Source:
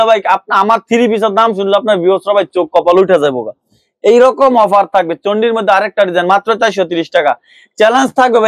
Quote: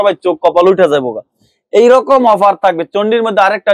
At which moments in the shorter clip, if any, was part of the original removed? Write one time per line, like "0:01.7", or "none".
none

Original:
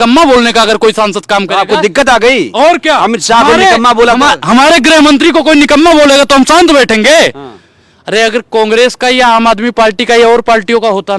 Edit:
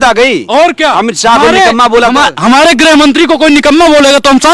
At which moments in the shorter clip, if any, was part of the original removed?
none

